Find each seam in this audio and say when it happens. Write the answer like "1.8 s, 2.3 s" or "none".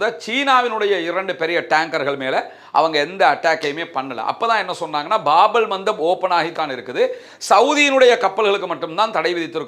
none